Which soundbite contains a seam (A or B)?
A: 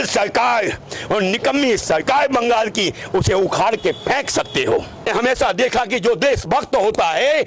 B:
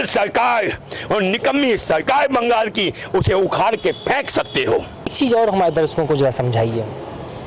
A